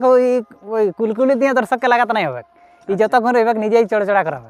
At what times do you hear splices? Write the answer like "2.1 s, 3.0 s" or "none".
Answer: none